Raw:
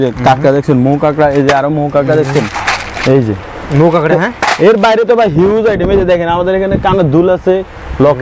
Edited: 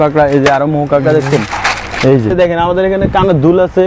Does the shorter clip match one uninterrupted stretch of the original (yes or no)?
no